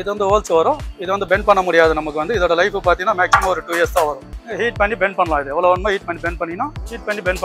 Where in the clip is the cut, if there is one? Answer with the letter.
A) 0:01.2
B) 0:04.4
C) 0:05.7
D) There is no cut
B